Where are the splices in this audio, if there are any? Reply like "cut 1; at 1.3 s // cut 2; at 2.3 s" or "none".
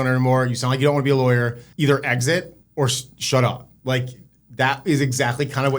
cut 1; at 1.6 s // cut 2; at 2.6 s